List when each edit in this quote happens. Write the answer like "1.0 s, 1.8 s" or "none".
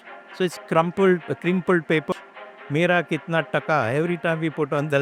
2.1 s